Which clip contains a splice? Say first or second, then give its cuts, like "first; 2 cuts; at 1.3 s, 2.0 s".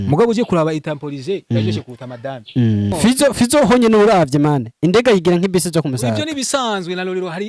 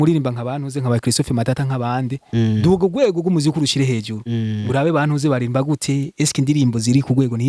first; 1 cut; at 2.9 s